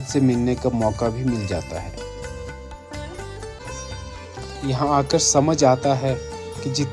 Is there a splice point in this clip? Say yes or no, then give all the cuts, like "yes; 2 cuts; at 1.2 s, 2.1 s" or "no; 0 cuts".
yes; 1 cut; at 3.6 s